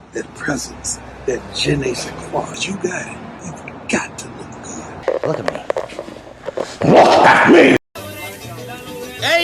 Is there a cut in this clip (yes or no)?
yes